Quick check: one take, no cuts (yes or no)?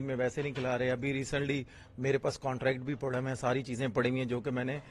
yes